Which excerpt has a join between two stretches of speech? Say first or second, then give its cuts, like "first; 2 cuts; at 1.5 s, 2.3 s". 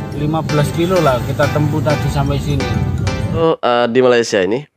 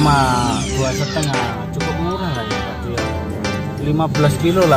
first; 1 cut; at 3.4 s